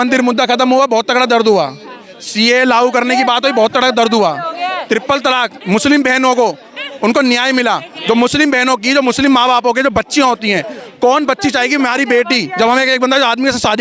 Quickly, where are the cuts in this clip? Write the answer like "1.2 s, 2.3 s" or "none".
none